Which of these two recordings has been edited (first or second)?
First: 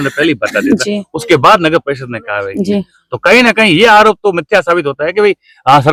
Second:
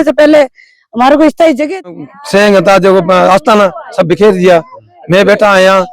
second